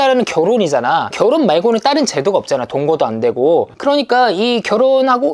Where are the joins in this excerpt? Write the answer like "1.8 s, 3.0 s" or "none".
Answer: 1.1 s